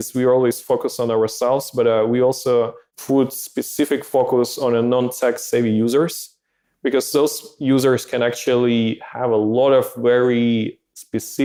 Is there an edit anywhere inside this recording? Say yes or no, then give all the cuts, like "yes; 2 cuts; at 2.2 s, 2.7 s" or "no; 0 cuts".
no; 0 cuts